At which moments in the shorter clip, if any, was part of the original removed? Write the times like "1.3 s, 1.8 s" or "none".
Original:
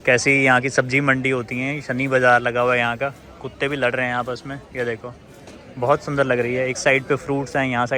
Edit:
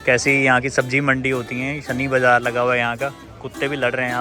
none